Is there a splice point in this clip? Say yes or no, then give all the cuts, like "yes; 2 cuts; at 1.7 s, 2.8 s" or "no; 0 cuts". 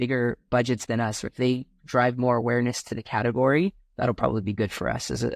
yes; 2 cuts; at 1.3 s, 3.9 s